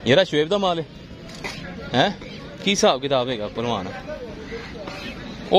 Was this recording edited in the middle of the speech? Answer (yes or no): no